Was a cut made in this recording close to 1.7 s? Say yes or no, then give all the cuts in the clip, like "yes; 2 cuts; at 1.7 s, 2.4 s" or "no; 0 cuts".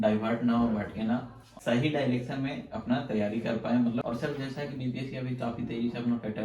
no; 1 cut; at 4.0 s